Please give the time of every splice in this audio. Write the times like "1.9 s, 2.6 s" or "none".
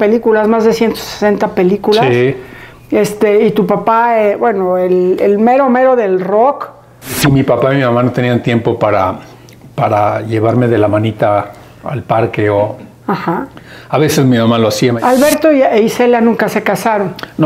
7.2 s, 15.0 s